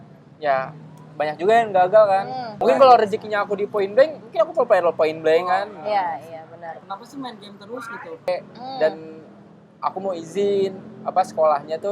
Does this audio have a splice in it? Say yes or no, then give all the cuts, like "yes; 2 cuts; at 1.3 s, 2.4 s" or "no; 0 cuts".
yes; 3 cuts; at 2.5 s, 6.8 s, 8.3 s